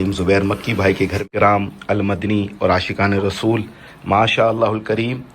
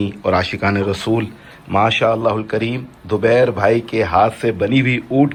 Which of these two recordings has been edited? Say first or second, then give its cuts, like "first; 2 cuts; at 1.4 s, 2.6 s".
first; 1 cut; at 1.2 s